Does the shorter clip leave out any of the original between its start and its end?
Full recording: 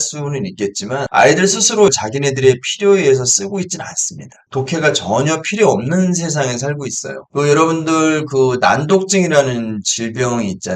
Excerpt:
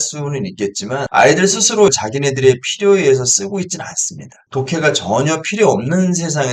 no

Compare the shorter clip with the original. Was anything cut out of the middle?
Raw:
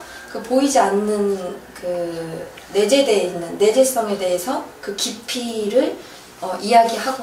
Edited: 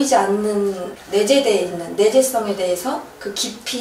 yes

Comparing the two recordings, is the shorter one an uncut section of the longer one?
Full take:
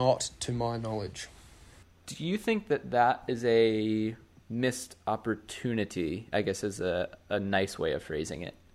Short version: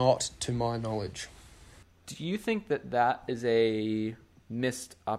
yes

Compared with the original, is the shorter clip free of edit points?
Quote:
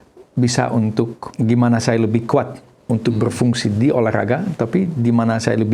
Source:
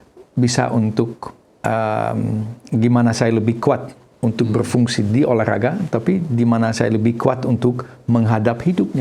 no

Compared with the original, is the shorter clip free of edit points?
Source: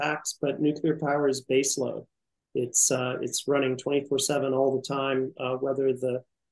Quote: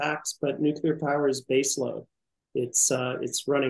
yes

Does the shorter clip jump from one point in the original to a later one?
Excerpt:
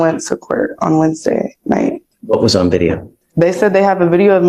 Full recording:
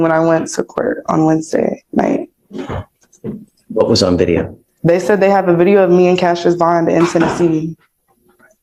yes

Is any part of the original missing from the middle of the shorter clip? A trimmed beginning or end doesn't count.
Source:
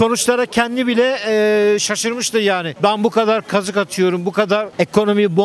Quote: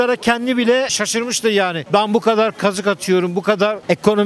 yes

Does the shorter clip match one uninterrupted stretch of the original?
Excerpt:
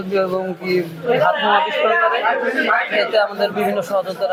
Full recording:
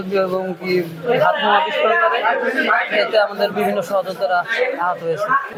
yes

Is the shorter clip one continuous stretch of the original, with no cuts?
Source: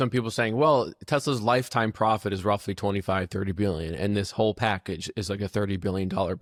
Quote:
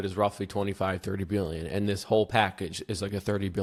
yes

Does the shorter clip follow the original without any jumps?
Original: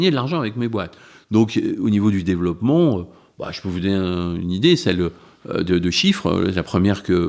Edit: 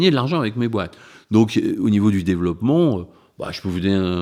yes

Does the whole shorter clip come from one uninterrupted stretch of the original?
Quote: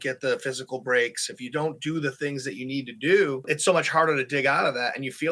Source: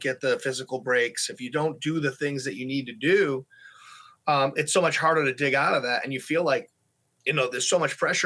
no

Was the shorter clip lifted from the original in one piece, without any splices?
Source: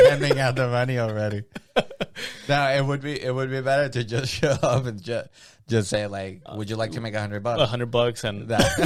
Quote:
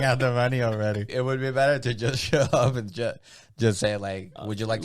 no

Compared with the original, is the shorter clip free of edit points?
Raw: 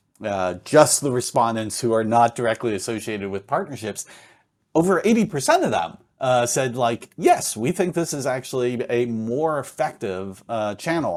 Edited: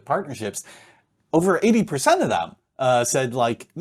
yes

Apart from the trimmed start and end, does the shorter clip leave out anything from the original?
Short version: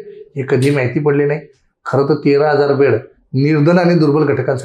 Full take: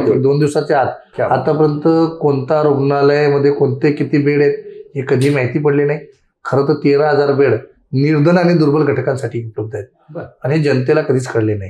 no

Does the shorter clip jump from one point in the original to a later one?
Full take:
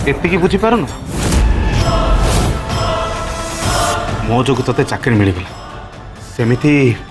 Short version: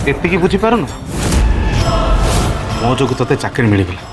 yes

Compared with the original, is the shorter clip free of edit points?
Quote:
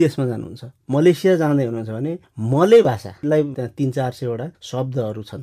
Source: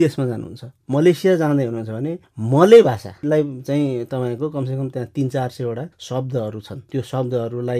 no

